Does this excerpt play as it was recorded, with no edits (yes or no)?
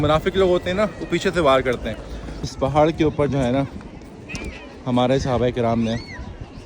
no